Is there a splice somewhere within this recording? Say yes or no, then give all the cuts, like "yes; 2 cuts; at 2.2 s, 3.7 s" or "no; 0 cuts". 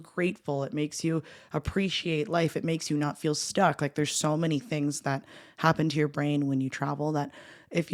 no; 0 cuts